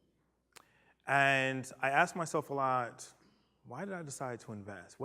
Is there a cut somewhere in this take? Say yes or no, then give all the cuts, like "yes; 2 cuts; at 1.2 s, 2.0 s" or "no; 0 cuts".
yes; 1 cut; at 1.8 s